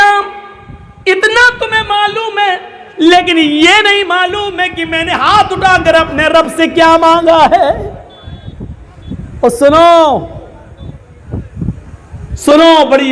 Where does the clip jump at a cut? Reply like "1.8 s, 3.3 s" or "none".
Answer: none